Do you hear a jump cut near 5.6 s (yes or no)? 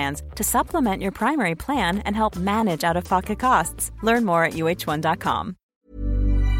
yes